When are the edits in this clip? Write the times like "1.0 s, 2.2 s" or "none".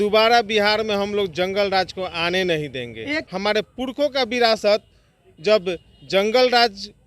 3.3 s